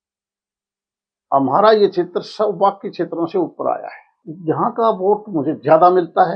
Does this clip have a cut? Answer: yes; 1 cut; at 4.2 s

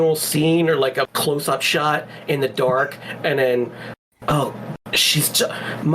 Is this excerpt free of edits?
no; 1 cut; at 1.1 s

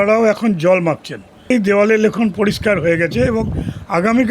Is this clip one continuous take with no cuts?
no; 1 cut; at 1.5 s

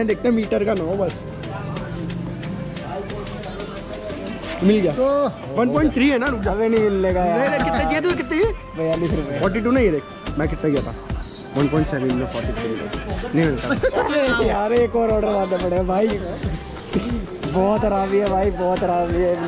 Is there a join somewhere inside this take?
no; 0 cuts

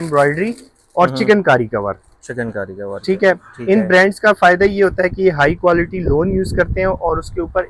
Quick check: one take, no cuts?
yes; 0 cuts

